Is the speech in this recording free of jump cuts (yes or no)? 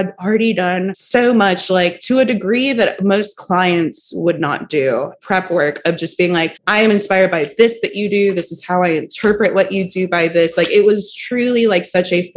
no